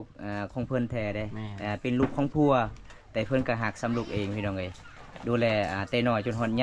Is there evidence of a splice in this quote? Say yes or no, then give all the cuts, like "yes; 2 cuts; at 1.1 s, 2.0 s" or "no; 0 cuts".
no; 0 cuts